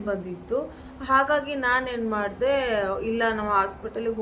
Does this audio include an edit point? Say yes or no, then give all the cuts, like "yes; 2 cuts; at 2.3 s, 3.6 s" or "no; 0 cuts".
no; 0 cuts